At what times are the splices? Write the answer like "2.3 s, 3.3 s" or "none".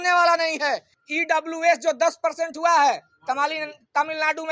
0.9 s